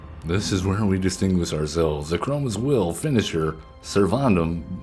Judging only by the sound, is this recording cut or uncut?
uncut